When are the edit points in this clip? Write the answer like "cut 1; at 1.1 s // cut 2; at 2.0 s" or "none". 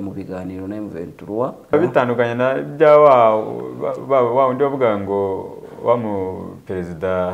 cut 1; at 1.7 s